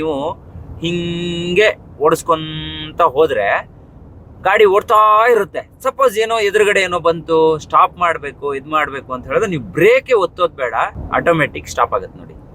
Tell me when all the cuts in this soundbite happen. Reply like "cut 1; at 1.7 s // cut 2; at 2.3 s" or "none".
cut 1; at 11.0 s